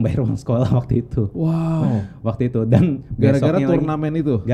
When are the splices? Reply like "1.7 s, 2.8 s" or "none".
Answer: none